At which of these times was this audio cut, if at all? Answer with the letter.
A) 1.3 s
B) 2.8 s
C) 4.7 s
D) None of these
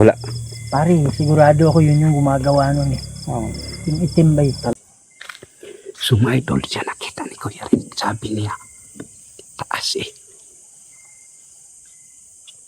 C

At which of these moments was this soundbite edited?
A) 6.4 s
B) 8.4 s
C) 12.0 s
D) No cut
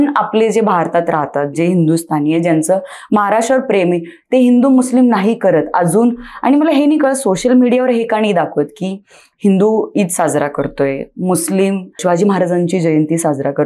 C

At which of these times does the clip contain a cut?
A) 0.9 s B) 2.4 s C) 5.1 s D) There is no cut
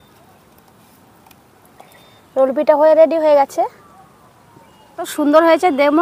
C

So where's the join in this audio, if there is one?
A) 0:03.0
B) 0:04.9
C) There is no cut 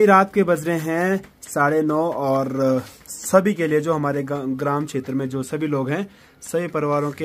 C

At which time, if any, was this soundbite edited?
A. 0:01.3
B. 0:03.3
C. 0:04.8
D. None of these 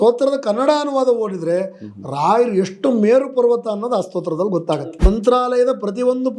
C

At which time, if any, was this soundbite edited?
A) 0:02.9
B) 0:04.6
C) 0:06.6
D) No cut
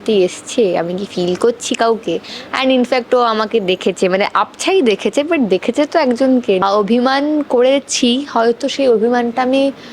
C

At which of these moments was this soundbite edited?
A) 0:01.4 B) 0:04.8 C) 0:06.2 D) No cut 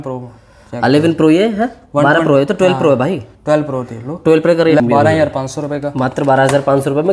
B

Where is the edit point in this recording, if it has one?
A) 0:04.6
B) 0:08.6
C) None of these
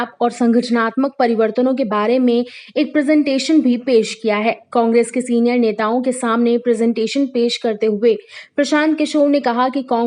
C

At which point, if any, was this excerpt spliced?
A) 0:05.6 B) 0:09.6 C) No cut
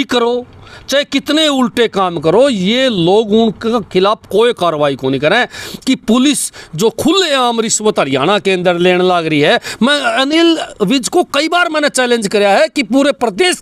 A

